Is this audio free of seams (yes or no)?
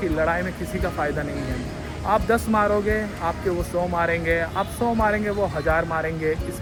yes